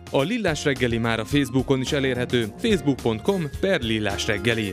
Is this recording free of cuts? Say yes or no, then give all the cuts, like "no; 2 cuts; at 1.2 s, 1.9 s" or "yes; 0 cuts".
yes; 0 cuts